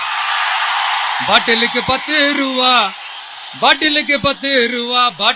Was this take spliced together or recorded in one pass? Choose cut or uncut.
uncut